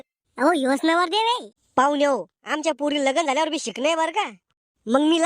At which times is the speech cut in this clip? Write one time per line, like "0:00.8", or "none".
0:01.5